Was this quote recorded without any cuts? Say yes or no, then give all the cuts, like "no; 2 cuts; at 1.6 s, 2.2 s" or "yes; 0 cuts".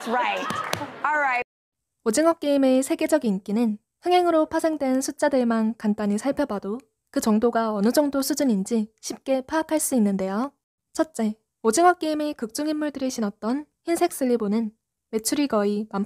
yes; 0 cuts